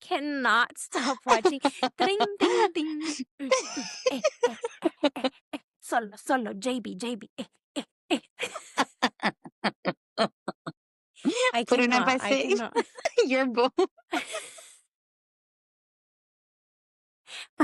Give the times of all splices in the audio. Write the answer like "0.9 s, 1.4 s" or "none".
12.9 s